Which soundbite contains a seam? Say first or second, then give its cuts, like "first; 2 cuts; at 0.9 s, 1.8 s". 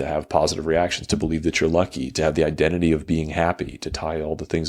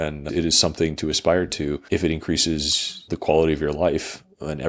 second; 2 cuts; at 1.8 s, 3.0 s